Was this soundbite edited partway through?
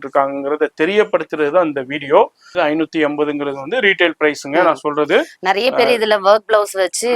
yes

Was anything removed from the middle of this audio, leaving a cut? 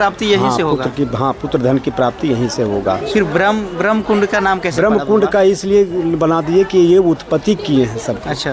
yes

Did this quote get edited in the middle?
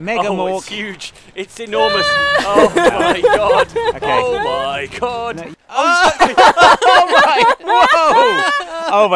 yes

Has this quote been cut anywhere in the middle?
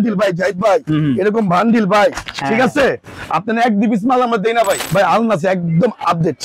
yes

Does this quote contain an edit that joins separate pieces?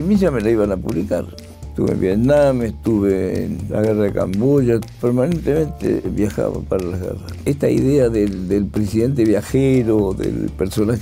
yes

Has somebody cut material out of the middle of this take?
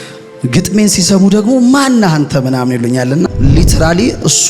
yes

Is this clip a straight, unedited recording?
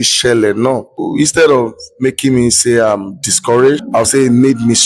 no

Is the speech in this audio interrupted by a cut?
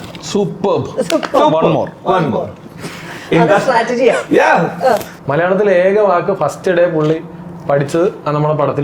yes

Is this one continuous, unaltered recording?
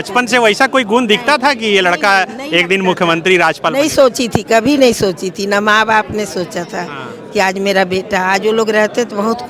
yes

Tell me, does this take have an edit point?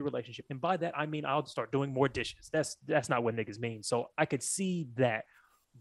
no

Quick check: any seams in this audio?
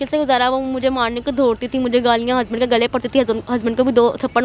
no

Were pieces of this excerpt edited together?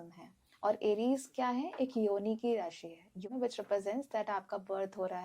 yes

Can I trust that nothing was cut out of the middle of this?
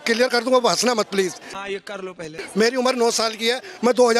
yes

